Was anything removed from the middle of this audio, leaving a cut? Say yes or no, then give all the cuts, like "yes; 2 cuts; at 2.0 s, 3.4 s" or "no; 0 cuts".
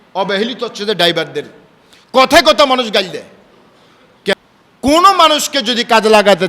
yes; 1 cut; at 4.3 s